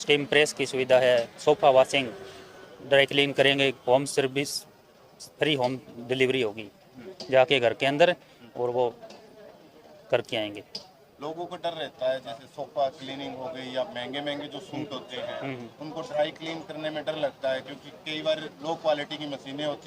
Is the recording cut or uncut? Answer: uncut